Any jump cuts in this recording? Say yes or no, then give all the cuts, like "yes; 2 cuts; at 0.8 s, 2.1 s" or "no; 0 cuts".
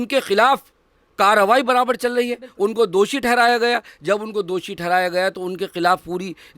no; 0 cuts